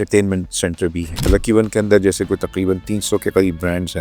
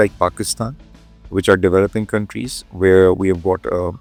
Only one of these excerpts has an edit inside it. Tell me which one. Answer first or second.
first